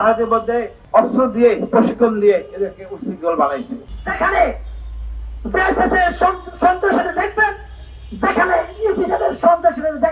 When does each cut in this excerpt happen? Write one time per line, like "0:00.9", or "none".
0:03.8